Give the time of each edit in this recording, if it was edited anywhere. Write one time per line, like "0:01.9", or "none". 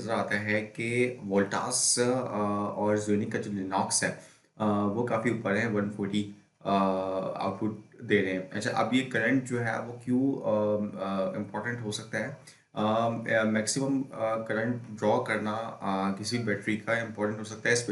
none